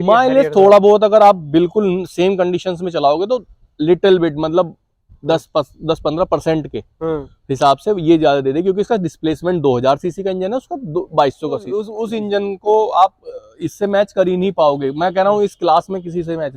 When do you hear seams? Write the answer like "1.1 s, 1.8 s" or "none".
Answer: 11.9 s